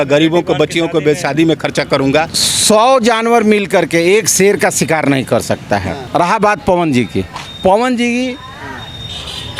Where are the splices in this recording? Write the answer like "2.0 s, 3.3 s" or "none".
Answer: 2.4 s, 6.0 s